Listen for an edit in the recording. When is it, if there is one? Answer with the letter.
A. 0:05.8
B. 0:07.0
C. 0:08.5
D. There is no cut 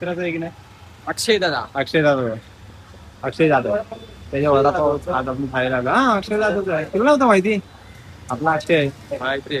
D